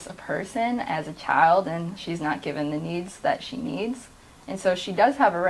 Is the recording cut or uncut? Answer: uncut